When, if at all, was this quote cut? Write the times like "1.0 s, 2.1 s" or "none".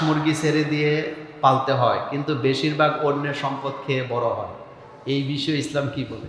none